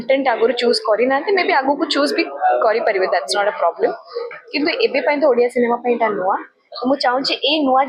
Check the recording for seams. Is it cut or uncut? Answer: uncut